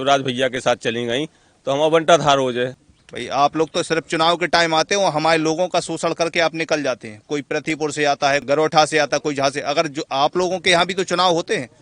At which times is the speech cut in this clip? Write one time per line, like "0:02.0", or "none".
0:02.8
0:08.4